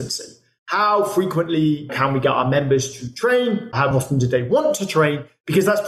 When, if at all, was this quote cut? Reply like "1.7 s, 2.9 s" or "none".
1.9 s, 3.9 s